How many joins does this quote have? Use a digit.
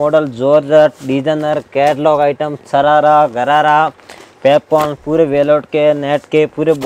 0